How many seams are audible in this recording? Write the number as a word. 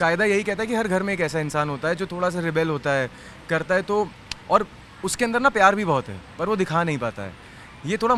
zero